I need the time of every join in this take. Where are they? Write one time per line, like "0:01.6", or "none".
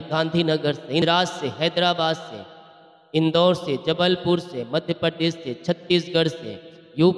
0:01.0